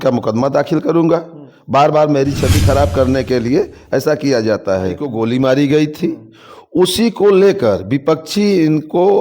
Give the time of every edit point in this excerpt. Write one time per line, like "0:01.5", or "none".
0:05.1